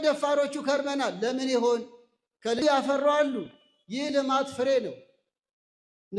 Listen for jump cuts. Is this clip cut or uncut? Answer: cut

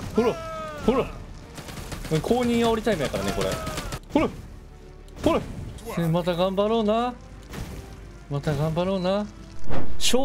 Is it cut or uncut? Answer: uncut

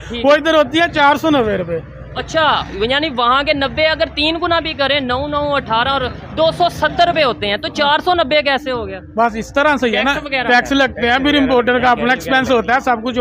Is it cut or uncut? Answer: uncut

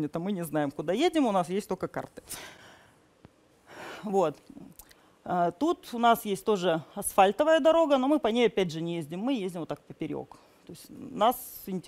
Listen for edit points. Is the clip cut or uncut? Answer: uncut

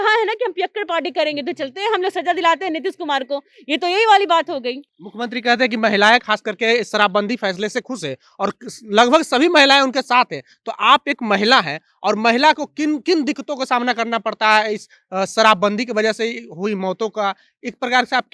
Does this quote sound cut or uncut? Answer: uncut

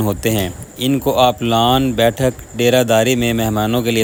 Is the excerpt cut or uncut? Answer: uncut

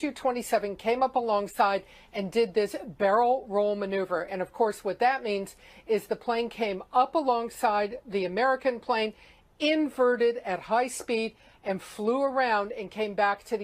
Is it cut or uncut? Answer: cut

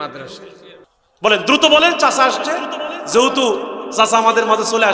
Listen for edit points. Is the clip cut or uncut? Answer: cut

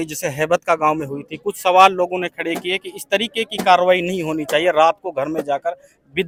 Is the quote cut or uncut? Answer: uncut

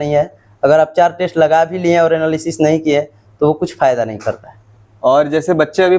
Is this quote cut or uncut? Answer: uncut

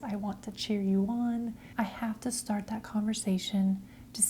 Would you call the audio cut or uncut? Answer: cut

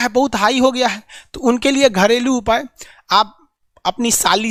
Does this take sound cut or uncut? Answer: uncut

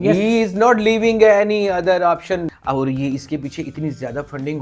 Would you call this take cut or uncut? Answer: cut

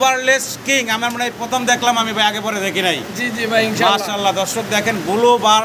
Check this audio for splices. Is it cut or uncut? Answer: uncut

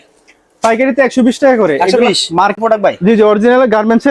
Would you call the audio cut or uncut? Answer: cut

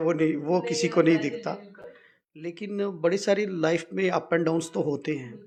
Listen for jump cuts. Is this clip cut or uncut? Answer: uncut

